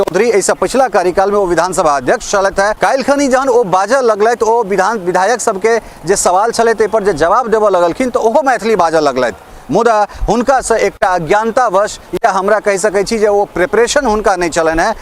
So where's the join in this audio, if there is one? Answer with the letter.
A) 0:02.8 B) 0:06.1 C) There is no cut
A